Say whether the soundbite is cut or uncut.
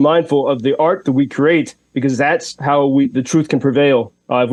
uncut